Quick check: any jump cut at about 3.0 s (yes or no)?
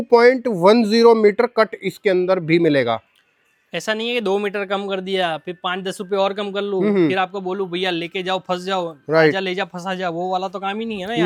no